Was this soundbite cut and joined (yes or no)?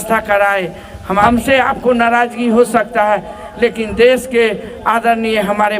yes